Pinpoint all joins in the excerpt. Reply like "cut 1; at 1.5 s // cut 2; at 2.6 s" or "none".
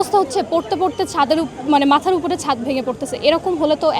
none